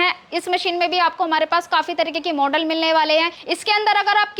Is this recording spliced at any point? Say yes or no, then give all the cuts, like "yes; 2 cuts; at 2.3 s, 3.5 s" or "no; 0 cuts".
yes; 1 cut; at 3.4 s